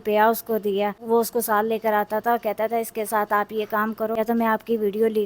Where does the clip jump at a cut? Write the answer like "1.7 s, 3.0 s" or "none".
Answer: 1.0 s, 4.2 s